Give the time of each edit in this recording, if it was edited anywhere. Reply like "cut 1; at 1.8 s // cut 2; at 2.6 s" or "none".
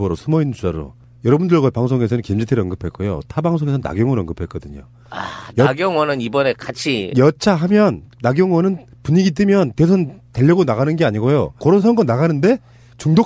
cut 1; at 1.2 s